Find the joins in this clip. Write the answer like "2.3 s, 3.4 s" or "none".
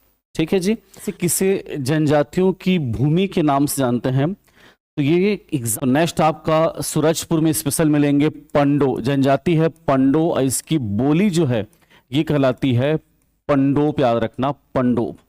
1.1 s, 5.7 s

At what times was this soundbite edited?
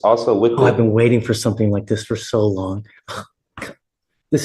none

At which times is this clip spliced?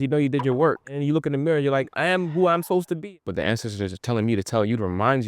0.9 s, 1.9 s, 3.0 s

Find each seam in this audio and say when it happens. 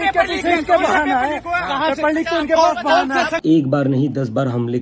3.4 s

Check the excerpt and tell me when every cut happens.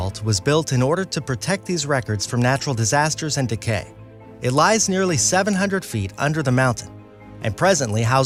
none

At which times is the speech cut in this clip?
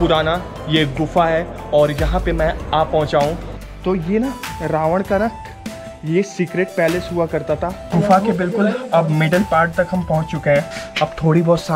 3.4 s, 7.9 s, 10.8 s

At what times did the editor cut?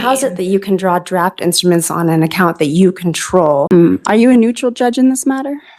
3.7 s

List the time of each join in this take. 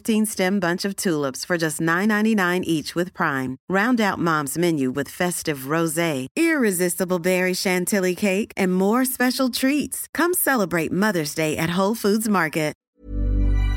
12.8 s

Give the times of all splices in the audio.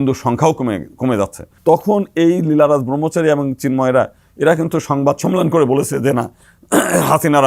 1.4 s

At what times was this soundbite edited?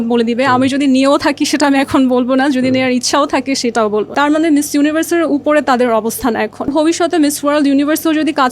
4.1 s, 6.7 s

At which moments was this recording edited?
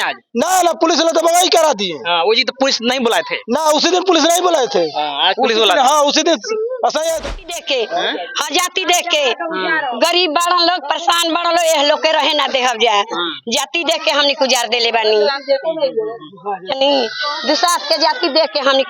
7.2 s

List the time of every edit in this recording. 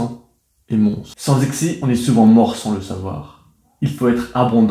1.1 s

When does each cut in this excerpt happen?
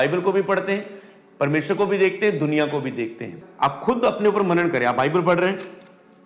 3.4 s

